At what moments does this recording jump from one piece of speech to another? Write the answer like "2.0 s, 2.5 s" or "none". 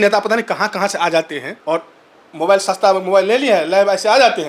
1.5 s